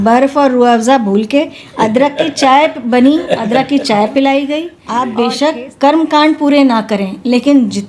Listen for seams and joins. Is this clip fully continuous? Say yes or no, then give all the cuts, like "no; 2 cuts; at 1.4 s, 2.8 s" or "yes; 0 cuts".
no; 1 cut; at 4.8 s